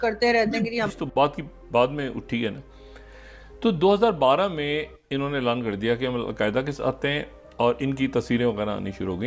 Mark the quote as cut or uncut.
cut